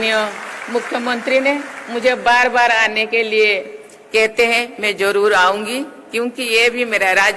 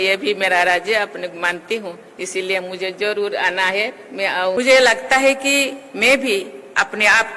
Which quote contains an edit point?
second; 1 cut; at 4.6 s

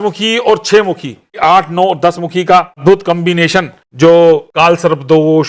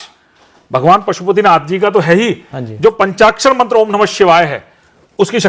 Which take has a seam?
first; 4 cuts; at 1.4 s, 2.8 s, 3.8 s, 4.5 s

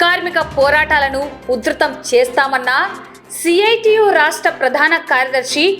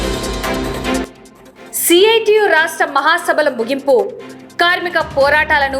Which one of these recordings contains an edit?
second; 1 cut; at 1.0 s

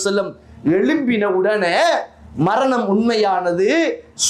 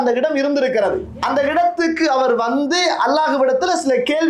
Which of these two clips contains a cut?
second; 1 cut; at 1.1 s

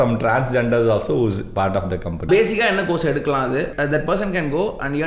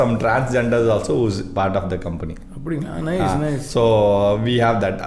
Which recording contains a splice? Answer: first; 2 cuts; at 2.3 s, 3.7 s

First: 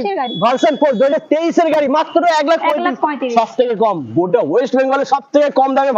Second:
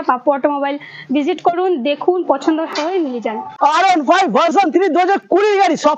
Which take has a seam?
second; 1 cut; at 3.5 s

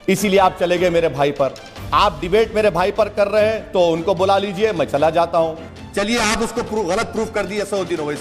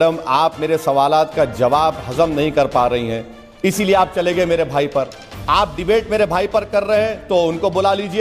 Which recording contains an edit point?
first; 1 cut; at 5.7 s

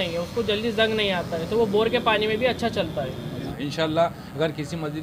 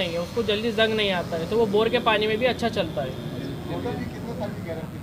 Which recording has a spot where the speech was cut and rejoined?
first; 1 cut; at 3.5 s

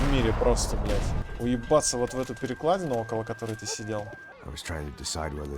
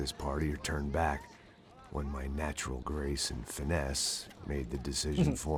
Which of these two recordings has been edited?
first; 2 cuts; at 1.2 s, 4.2 s

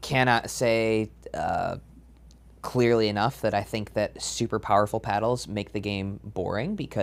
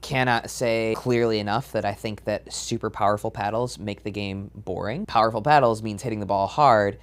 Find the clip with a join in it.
second; 2 cuts; at 0.9 s, 5.0 s

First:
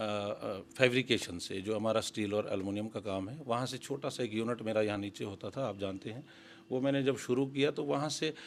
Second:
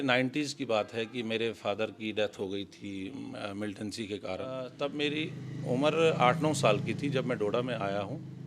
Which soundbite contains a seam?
second; 1 cut; at 4.7 s

